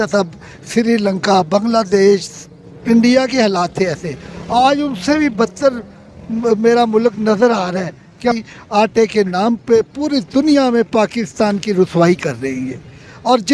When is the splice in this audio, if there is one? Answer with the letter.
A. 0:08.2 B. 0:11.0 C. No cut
A